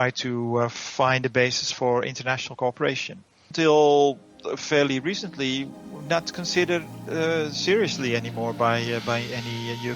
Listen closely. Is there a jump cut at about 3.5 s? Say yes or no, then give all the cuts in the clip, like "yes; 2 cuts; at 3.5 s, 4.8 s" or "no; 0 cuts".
yes; 1 cut; at 3.5 s